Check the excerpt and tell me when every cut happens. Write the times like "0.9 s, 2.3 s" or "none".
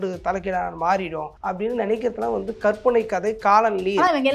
1.3 s